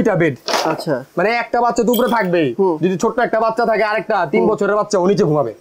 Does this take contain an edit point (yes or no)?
no